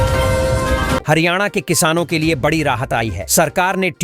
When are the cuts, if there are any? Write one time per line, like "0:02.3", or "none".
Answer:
0:01.0